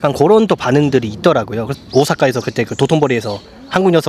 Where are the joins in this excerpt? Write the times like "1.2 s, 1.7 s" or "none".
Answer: 1.7 s